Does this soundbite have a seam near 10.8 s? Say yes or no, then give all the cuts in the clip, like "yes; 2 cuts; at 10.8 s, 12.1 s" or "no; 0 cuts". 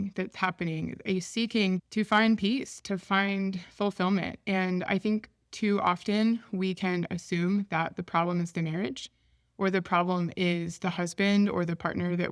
no; 1 cut; at 1.8 s